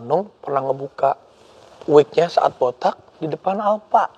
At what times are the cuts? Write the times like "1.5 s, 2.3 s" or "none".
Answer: none

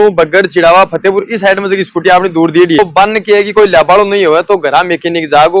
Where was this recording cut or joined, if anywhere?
2.8 s

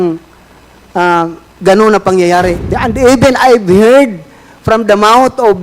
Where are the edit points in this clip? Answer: 2.7 s

